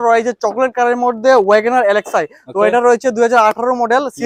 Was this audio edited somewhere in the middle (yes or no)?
no